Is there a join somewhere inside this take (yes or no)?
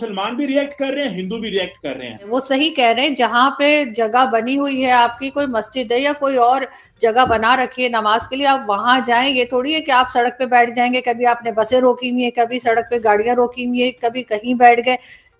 yes